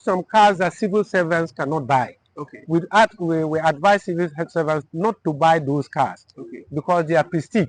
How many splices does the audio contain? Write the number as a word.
zero